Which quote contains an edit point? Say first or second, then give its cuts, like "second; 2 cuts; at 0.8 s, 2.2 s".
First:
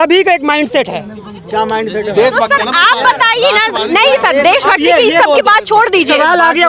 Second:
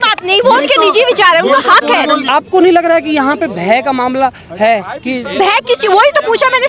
second; 1 cut; at 2.2 s